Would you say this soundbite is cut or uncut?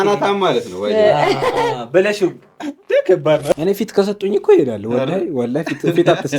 cut